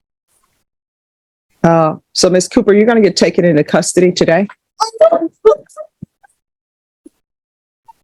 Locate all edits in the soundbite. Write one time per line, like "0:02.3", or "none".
0:06.6